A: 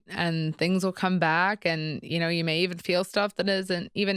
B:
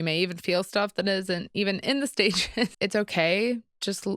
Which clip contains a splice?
B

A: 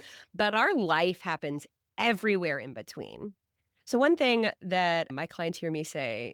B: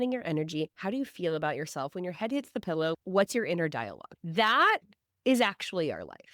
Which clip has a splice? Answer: B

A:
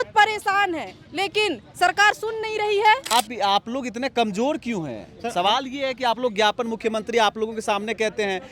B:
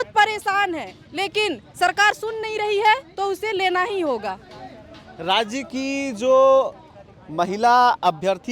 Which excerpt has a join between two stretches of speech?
A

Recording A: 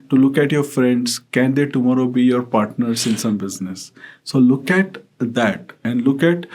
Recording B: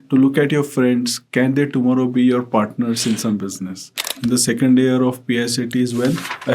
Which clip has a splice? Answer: B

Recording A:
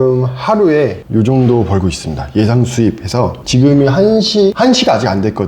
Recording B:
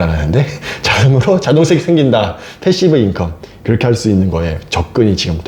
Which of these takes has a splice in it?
A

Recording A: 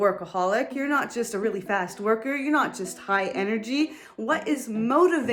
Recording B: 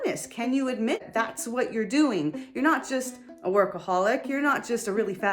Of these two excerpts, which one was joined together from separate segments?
B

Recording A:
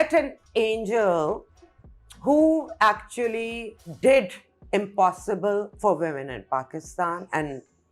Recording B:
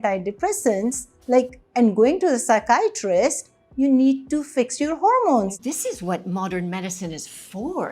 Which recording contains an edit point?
B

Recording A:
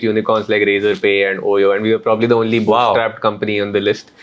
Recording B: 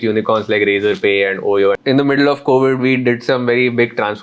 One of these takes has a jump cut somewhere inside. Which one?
B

